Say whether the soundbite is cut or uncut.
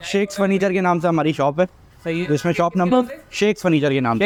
uncut